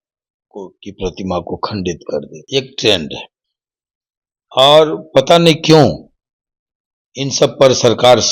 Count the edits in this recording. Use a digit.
1